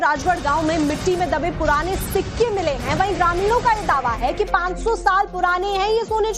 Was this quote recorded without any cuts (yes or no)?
no